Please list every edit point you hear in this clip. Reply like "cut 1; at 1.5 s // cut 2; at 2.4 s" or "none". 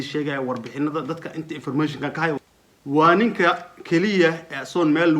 cut 1; at 2.4 s